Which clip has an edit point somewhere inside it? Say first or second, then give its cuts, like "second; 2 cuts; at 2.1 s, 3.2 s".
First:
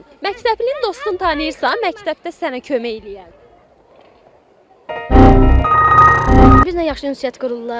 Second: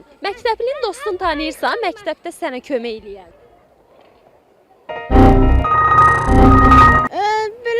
first; 1 cut; at 6.6 s